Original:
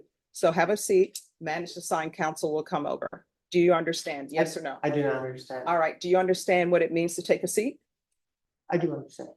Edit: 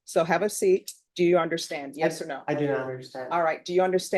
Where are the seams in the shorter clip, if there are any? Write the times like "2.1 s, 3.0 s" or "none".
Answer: 1.0 s